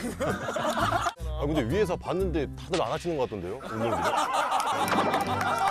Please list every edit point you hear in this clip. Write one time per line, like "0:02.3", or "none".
0:01.2
0:04.7

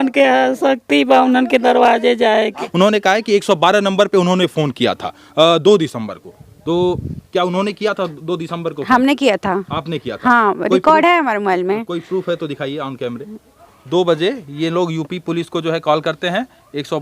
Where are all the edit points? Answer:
0:02.6
0:13.7

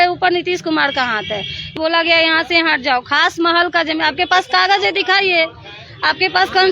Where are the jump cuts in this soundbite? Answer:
0:01.7

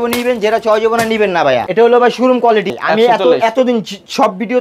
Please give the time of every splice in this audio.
0:01.7
0:02.7

